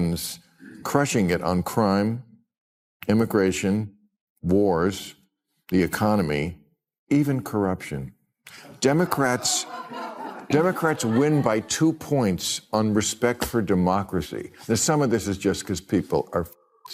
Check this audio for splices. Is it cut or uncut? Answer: uncut